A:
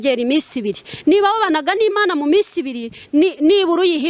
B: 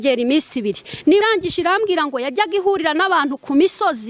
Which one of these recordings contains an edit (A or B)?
B